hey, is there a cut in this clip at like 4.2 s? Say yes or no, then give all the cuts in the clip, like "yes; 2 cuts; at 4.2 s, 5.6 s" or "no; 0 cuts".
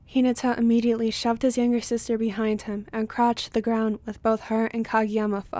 no; 0 cuts